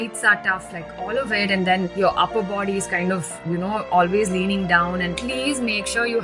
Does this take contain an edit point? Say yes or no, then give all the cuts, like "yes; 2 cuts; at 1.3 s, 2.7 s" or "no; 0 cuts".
yes; 1 cut; at 5.2 s